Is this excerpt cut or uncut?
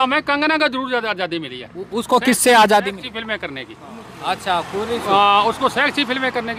uncut